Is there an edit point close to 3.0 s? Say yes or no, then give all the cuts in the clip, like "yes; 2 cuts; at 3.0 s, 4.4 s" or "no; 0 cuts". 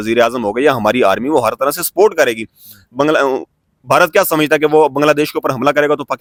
no; 0 cuts